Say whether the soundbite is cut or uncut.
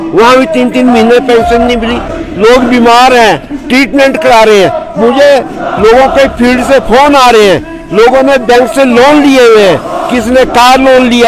cut